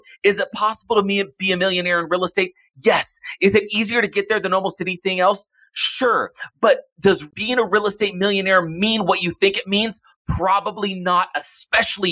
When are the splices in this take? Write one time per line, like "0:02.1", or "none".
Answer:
0:07.3